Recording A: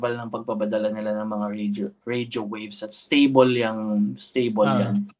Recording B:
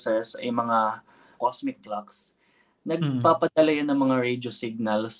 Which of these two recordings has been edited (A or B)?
B